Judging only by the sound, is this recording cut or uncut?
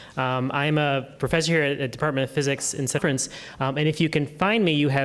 uncut